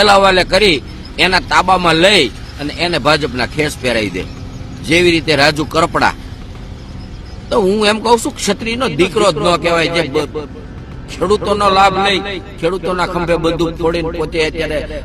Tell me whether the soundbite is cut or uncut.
uncut